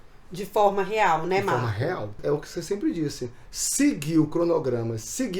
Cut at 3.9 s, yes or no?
no